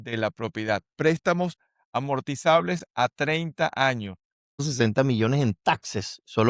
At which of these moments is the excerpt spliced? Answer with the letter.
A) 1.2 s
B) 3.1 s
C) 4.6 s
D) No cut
C